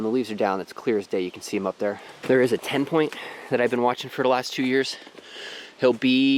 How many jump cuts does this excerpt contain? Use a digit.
1